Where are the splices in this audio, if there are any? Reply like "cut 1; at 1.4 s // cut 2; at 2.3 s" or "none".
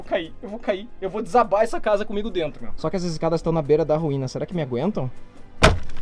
cut 1; at 2.7 s